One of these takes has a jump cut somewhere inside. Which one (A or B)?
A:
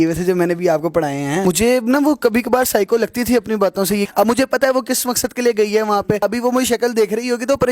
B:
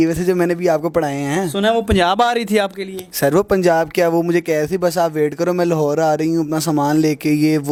A